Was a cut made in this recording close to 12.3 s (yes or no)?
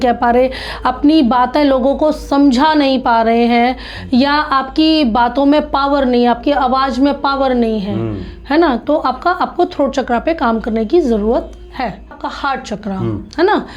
yes